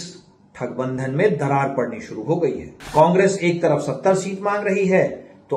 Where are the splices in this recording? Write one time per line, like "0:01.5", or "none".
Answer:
0:02.7